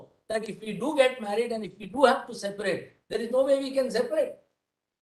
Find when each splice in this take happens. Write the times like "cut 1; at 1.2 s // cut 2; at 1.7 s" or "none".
none